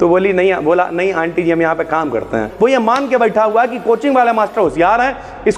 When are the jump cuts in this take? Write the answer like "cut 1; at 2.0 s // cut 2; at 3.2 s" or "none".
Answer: cut 1; at 2.5 s